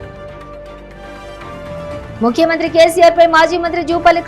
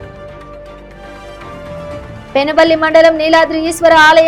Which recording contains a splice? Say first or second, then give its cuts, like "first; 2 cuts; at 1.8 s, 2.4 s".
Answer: second; 1 cut; at 2.2 s